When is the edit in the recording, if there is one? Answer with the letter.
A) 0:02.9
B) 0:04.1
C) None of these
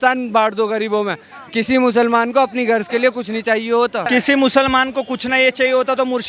B